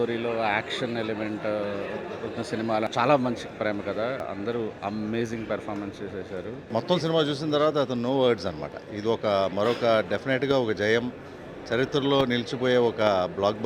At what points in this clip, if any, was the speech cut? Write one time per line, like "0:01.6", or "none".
0:02.9
0:04.2
0:06.6